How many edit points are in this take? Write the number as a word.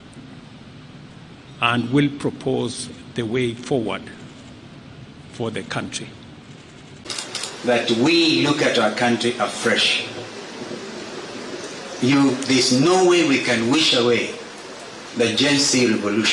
one